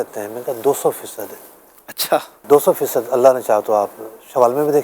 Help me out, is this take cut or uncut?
cut